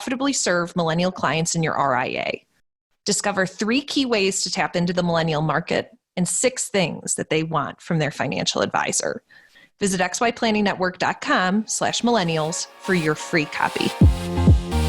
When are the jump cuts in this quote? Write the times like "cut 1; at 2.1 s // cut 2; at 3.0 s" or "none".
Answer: cut 1; at 13.9 s